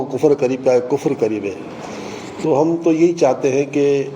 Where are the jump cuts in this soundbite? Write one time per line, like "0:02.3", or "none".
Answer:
none